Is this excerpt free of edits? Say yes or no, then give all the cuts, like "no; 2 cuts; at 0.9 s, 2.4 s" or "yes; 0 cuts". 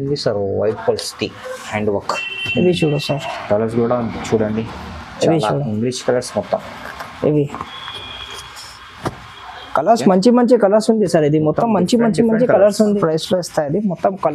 no; 1 cut; at 13.0 s